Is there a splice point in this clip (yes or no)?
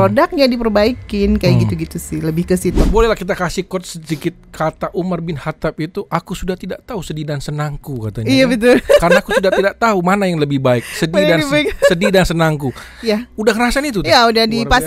yes